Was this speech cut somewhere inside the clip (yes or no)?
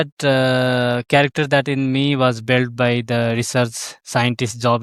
no